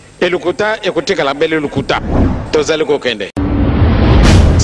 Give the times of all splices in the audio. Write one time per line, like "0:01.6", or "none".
0:03.3